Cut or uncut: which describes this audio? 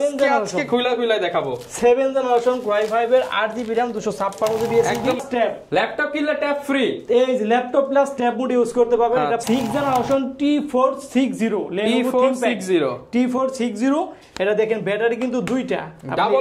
cut